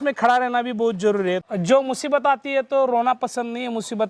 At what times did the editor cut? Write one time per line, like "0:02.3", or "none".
0:01.5